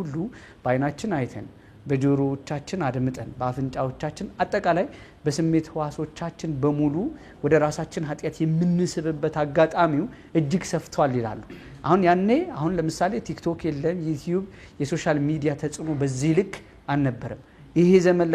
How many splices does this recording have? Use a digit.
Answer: 0